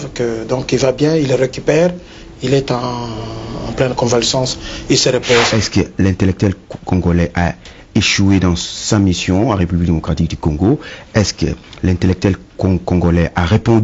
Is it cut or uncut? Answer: cut